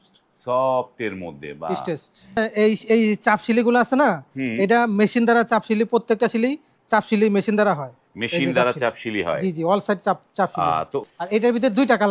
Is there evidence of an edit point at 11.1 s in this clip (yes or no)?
yes